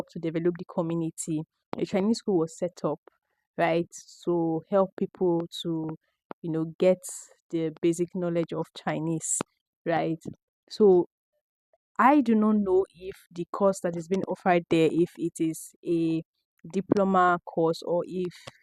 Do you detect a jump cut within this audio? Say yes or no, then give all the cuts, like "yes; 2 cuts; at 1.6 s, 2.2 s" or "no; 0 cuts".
no; 0 cuts